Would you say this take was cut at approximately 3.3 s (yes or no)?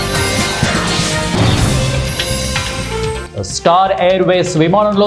yes